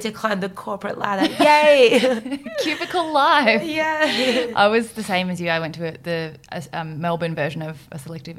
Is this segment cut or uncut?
uncut